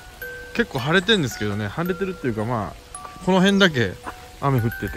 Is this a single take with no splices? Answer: yes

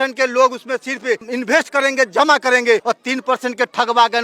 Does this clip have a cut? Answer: yes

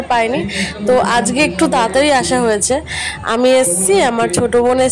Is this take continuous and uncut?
yes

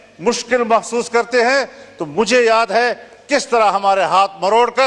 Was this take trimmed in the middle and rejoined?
no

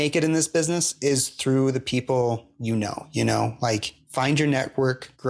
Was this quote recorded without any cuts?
yes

